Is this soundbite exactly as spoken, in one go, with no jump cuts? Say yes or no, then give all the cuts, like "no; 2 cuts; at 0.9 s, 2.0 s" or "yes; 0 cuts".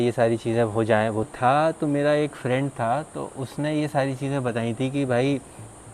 no; 1 cut; at 1.3 s